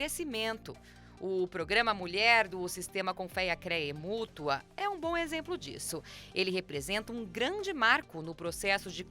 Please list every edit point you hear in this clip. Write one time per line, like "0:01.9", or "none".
none